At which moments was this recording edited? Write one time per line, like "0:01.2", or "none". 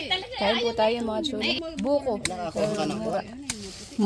0:01.4